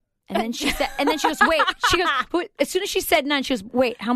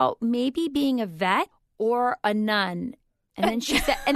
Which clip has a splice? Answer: second; 1 cut; at 1.6 s

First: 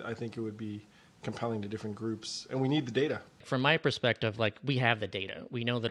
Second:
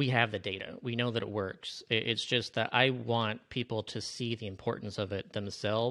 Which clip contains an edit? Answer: first; 1 cut; at 3.5 s

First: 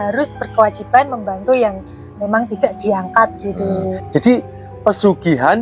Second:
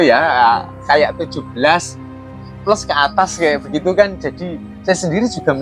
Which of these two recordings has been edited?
first; 1 cut; at 3.8 s

